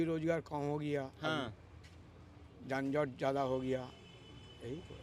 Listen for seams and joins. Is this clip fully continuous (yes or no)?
yes